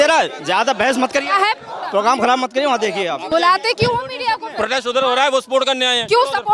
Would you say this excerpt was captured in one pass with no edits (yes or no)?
no